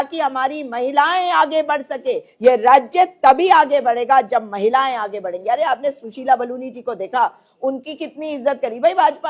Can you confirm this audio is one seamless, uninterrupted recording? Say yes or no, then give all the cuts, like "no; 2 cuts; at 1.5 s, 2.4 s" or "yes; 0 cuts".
yes; 0 cuts